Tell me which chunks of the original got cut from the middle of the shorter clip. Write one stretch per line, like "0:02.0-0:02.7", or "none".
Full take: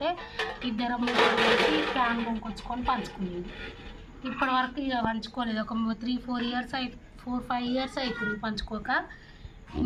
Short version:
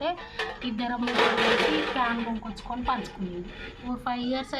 0:03.7-0:07.1